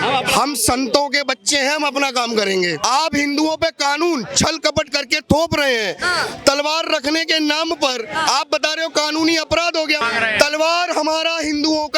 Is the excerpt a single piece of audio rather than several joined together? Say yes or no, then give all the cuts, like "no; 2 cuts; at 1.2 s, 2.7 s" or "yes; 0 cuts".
no; 2 cuts; at 2.8 s, 10.0 s